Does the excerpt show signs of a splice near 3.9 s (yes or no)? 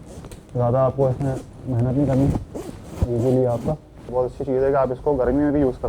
yes